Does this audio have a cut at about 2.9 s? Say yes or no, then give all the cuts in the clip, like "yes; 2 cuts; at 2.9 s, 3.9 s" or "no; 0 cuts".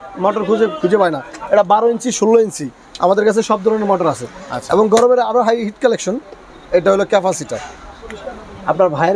no; 0 cuts